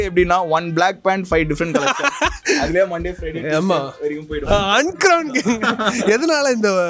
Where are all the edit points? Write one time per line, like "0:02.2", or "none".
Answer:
0:04.4